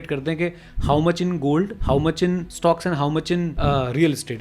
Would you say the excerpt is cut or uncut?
cut